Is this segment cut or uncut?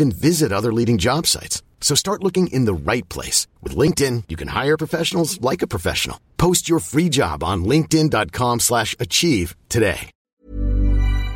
cut